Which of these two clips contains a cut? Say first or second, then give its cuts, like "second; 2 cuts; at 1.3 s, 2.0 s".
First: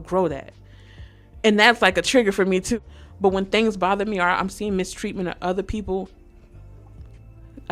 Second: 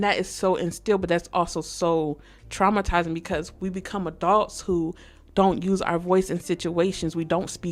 first; 1 cut; at 2.7 s